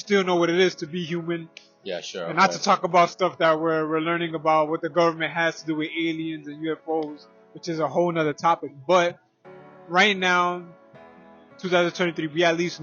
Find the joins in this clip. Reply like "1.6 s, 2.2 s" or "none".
none